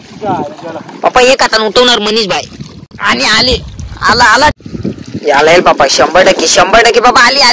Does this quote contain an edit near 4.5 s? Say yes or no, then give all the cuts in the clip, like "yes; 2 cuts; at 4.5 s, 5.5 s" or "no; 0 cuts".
yes; 1 cut; at 4.5 s